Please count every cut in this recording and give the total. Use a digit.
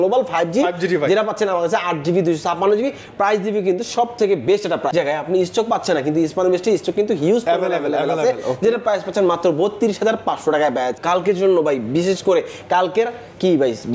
2